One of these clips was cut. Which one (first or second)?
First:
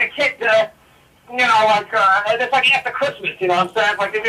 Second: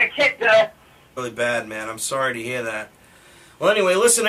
first